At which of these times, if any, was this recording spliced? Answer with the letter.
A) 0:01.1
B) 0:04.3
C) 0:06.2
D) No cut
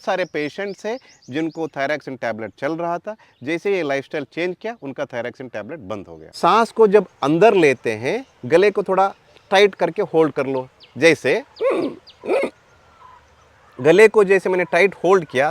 C